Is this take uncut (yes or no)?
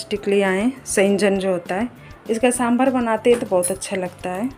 yes